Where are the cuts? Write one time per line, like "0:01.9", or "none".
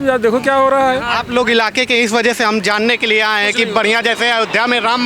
none